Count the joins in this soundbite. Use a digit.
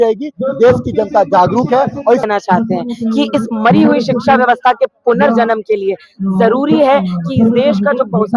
1